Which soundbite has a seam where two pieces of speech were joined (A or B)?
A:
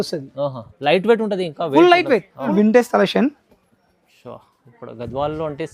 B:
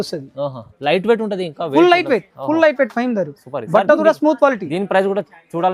A